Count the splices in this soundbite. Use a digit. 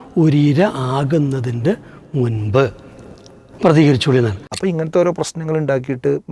1